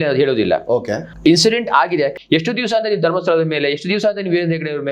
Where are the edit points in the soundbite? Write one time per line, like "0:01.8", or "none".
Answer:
0:01.1
0:02.2